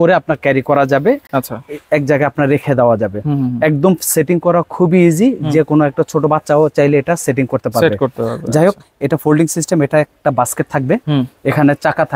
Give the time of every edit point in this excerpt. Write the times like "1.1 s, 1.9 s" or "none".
none